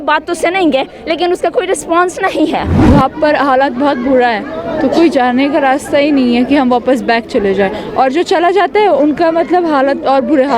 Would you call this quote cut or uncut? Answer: cut